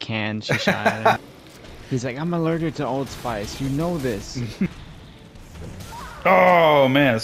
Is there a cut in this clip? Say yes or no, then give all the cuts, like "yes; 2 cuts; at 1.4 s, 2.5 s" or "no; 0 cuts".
yes; 2 cuts; at 1.2 s, 4.7 s